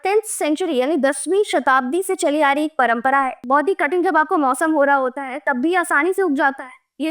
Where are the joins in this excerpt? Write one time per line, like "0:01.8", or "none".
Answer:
0:03.4